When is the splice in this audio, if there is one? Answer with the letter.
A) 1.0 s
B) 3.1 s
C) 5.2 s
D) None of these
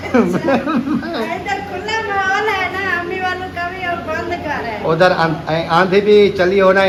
D